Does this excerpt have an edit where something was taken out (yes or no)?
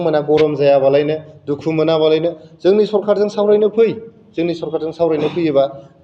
no